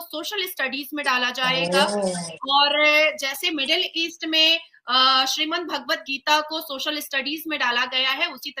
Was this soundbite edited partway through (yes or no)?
no